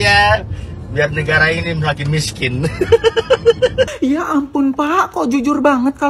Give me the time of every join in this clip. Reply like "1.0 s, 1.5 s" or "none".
none